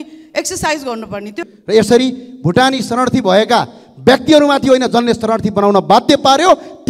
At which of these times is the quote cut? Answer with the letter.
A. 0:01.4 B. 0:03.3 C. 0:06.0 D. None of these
A